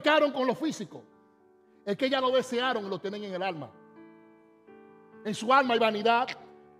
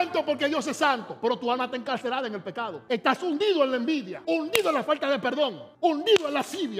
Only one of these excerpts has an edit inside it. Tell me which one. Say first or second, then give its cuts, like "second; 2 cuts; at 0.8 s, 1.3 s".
second; 3 cuts; at 2.8 s, 4.1 s, 5.6 s